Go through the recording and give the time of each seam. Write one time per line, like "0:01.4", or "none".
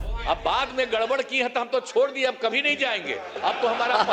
none